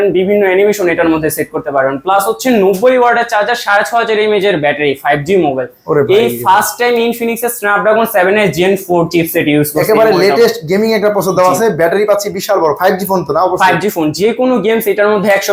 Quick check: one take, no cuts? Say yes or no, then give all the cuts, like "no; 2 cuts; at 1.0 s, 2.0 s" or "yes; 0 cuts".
yes; 0 cuts